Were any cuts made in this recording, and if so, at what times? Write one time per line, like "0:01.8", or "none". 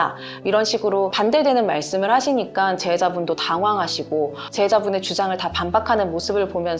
0:01.1
0:04.4